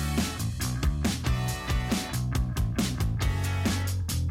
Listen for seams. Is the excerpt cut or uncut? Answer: cut